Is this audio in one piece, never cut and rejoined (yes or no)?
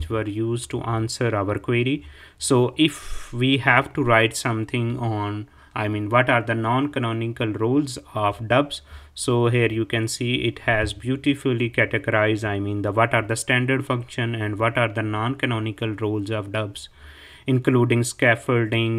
yes